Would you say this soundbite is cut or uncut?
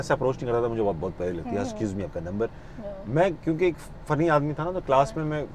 uncut